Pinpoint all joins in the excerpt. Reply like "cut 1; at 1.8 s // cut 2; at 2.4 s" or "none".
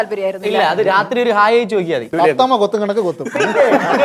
cut 1; at 2.1 s